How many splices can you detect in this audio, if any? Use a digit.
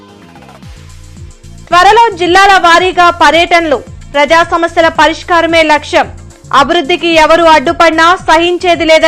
1